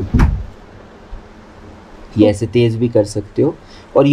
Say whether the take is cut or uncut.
uncut